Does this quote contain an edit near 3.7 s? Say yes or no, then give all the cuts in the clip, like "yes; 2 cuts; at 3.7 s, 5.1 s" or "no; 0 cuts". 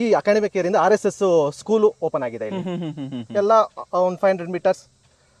no; 0 cuts